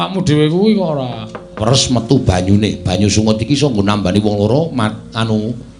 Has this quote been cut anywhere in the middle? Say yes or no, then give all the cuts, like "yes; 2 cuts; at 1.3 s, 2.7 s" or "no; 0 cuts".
yes; 1 cut; at 1.5 s